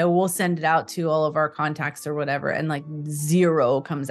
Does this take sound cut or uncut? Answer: uncut